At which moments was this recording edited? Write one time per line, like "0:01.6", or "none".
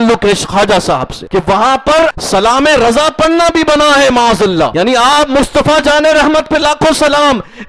0:01.1
0:02.2
0:04.7